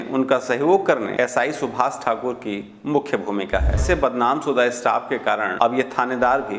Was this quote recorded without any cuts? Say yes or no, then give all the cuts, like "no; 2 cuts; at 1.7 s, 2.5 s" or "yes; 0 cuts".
no; 3 cuts; at 1.1 s, 3.8 s, 5.5 s